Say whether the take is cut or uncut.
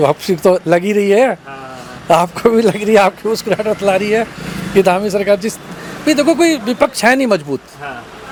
uncut